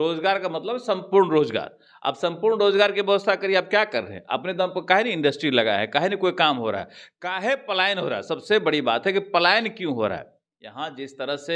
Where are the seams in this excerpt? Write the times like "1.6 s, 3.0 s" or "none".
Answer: none